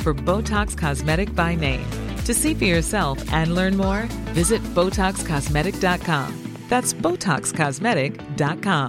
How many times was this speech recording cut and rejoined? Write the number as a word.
zero